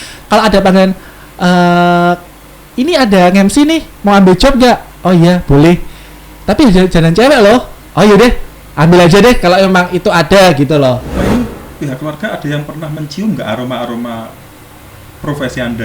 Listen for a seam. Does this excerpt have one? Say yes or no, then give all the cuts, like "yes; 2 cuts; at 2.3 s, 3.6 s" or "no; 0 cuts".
yes; 1 cut; at 11.1 s